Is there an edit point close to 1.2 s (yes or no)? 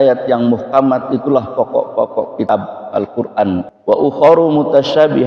no